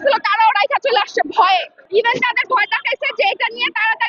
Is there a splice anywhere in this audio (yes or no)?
yes